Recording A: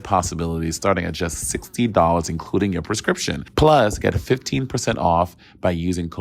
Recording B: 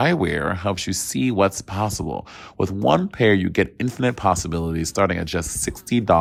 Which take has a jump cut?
A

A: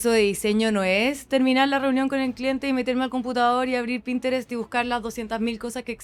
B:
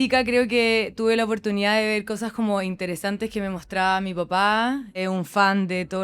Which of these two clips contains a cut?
B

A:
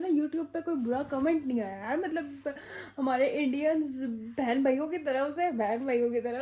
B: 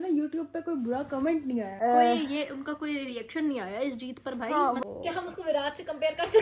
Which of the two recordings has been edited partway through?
B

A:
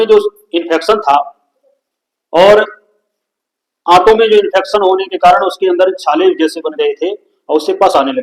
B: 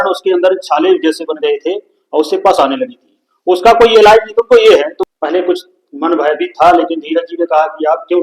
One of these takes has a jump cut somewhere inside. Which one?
B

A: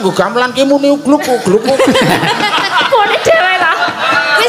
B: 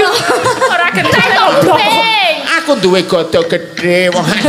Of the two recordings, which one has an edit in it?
B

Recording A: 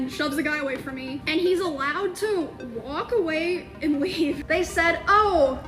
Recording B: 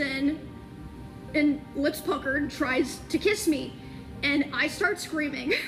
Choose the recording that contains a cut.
A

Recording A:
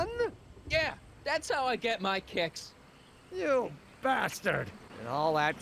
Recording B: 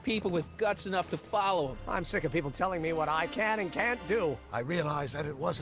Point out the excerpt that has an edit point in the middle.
B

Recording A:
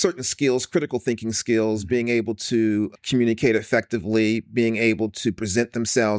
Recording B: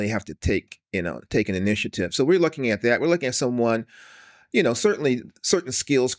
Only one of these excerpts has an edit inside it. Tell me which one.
A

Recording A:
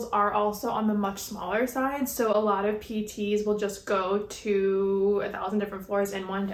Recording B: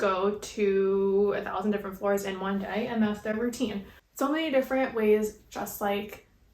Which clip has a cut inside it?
B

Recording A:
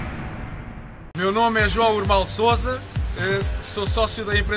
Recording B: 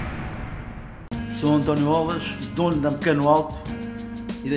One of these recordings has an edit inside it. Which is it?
B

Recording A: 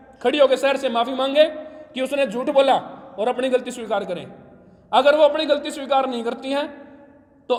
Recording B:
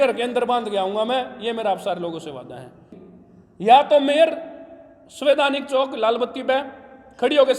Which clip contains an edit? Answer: B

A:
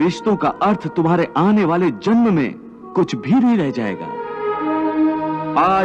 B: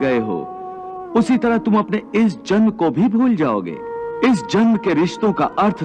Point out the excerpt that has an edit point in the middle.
B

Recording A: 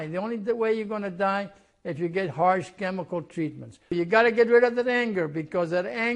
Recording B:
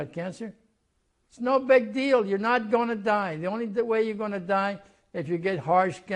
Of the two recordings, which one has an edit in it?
A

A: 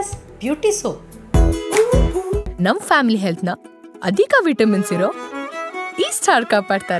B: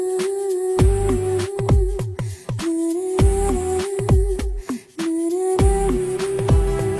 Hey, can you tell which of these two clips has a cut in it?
A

